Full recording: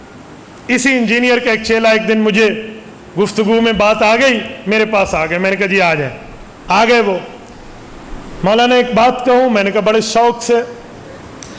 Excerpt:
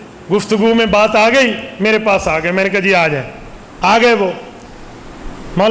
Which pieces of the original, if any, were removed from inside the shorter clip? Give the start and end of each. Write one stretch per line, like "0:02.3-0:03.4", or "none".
none